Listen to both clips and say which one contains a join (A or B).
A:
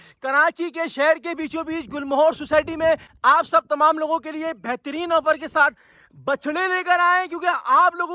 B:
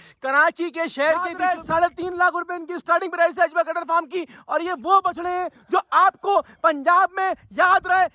B